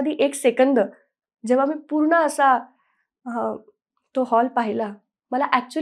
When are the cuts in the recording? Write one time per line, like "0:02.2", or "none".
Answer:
none